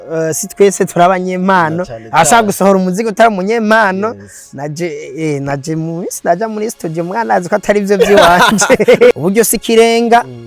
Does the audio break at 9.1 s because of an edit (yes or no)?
yes